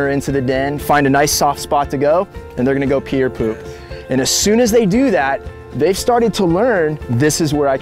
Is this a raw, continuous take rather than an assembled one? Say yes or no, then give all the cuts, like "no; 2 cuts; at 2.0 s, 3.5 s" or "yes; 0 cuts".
no; 1 cut; at 4.9 s